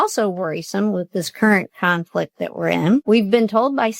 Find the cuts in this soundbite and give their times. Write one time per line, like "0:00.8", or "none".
0:03.0